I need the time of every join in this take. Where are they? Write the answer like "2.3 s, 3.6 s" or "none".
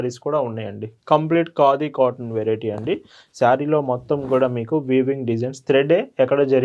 none